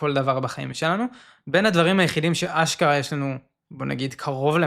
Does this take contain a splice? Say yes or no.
no